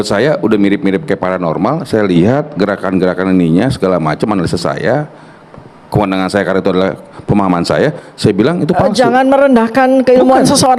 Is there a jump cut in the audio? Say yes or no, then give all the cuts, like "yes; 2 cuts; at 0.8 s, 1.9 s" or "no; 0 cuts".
no; 0 cuts